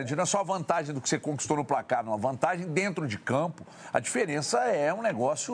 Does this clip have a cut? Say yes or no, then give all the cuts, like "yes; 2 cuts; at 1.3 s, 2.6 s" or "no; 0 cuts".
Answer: no; 0 cuts